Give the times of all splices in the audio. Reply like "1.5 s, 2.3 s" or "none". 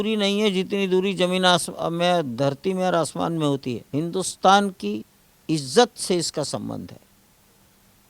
3.8 s